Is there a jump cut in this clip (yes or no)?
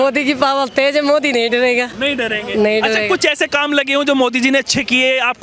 no